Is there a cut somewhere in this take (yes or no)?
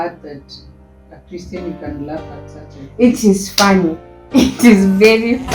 no